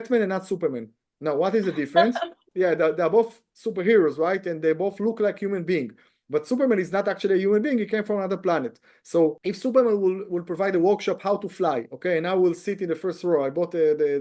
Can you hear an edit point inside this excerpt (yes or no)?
yes